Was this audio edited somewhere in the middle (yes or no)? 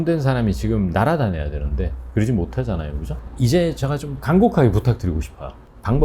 yes